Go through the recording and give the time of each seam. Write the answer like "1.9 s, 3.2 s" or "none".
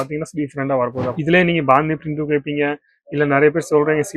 1.1 s

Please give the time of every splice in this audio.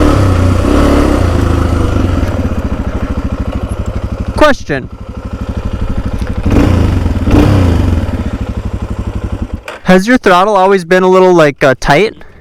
none

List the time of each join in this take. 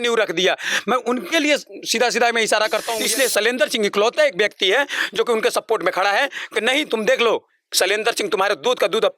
3.0 s

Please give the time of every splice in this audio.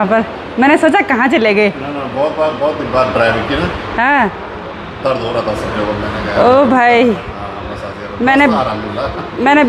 none

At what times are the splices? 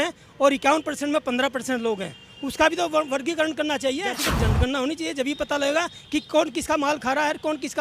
4.2 s

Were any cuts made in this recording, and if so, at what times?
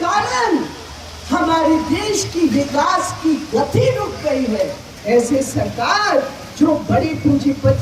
4.9 s

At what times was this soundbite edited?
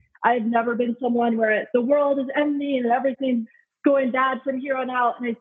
1.7 s, 3.5 s

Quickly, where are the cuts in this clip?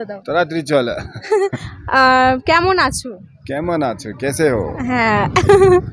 none

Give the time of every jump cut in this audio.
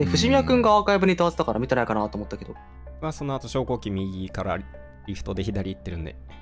none

